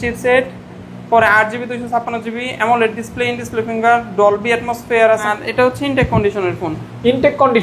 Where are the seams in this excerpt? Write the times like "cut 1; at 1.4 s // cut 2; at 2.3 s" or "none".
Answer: cut 1; at 5.3 s

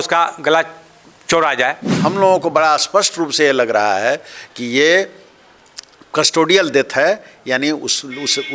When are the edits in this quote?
cut 1; at 1.9 s

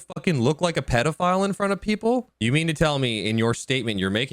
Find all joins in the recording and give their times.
cut 1; at 2.3 s

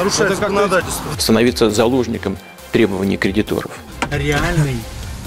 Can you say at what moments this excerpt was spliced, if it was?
cut 1; at 1.0 s // cut 2; at 3.9 s

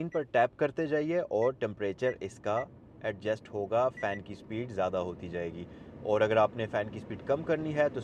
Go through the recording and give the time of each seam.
none

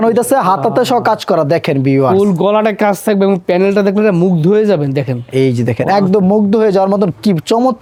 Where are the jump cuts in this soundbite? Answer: none

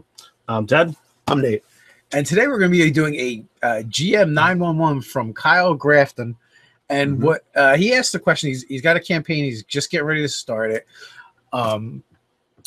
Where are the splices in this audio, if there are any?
cut 1; at 2.7 s

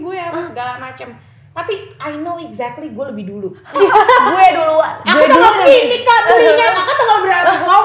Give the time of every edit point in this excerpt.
cut 1; at 3.6 s

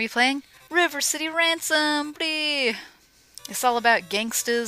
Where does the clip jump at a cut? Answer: none

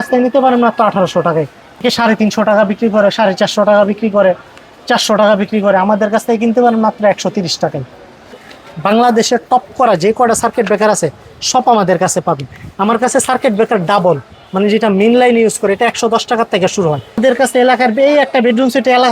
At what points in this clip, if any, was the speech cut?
cut 1; at 1.8 s // cut 2; at 8.4 s // cut 3; at 17.2 s

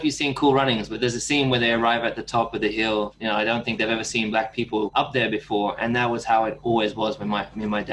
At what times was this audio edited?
cut 1; at 0.9 s // cut 2; at 3.1 s // cut 3; at 4.9 s

